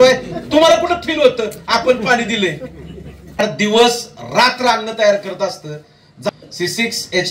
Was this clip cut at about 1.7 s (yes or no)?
no